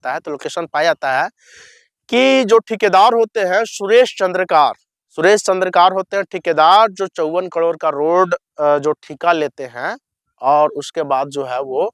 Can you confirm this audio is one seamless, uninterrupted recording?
yes; 0 cuts

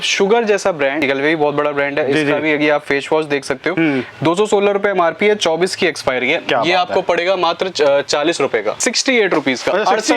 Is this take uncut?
no; 2 cuts; at 1.0 s, 8.8 s

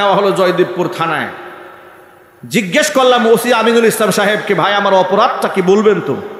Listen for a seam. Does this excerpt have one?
no; 0 cuts

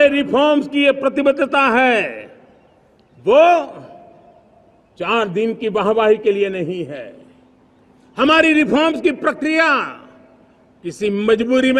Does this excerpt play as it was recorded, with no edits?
yes; 0 cuts

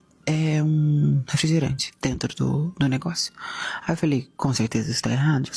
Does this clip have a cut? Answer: no; 0 cuts

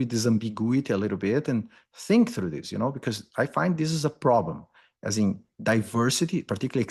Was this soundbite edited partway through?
no; 0 cuts

